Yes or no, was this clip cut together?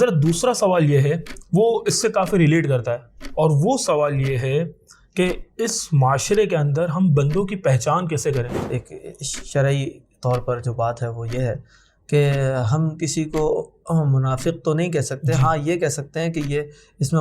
yes